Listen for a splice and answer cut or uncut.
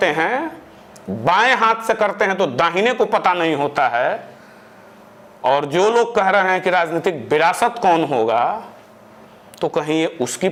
uncut